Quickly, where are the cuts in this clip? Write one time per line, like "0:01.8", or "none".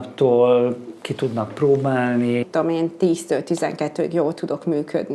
0:02.4